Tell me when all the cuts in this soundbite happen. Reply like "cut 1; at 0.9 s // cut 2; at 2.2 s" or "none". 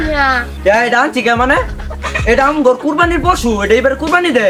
none